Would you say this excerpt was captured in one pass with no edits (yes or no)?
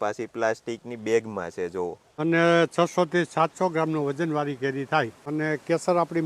no